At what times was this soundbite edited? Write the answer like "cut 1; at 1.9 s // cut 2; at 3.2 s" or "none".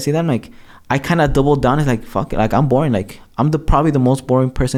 none